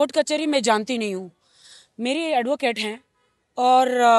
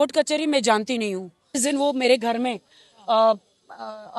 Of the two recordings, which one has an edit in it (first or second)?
second